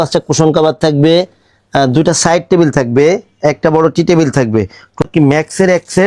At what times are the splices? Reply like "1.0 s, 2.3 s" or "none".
5.0 s